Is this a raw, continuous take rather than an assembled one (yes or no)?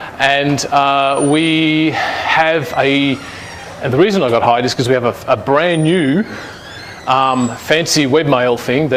no